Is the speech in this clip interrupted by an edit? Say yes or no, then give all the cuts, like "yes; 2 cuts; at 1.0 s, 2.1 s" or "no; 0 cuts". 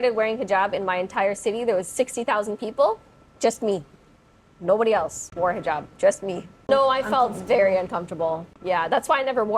yes; 1 cut; at 6.6 s